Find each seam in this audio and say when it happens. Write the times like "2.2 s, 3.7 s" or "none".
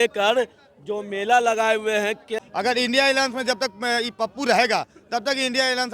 2.3 s